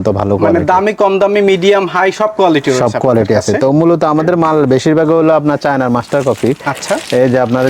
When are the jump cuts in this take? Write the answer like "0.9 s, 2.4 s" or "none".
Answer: none